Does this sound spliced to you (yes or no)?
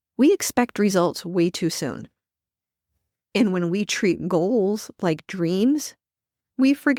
no